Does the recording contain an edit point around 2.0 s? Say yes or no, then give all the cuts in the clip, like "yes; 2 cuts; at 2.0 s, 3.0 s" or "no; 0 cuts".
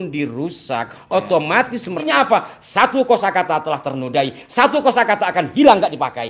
yes; 1 cut; at 2.0 s